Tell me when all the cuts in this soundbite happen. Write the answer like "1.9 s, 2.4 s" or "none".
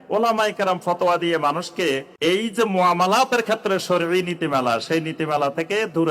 2.1 s

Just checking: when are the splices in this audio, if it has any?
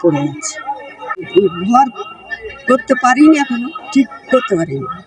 1.3 s

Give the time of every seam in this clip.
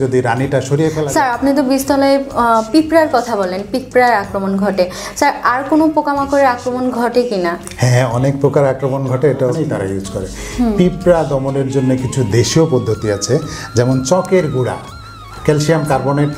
1.0 s, 9.6 s

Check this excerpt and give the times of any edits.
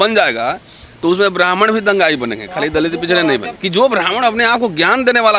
3.5 s

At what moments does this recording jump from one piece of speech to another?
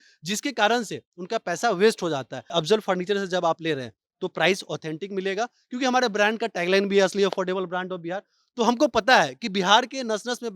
2.5 s

